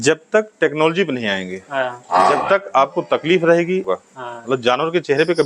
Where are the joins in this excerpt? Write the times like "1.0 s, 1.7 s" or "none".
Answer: 3.8 s